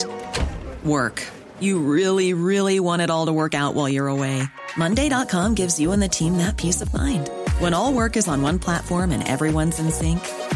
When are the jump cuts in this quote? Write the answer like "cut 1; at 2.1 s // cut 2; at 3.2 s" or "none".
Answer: none